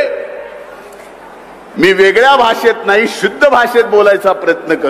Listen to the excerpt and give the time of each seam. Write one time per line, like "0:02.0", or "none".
none